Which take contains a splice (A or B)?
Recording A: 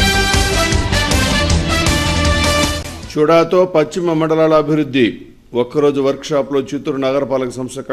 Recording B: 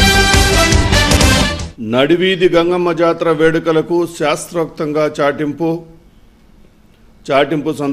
B